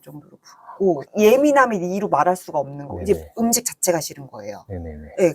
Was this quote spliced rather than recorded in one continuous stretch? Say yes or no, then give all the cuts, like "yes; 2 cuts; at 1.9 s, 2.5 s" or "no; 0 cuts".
yes; 1 cut; at 1.0 s